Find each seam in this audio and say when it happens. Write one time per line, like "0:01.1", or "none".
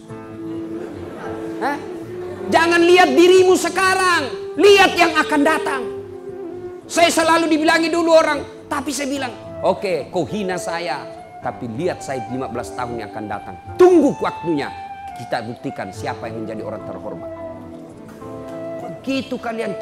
0:17.0
0:19.0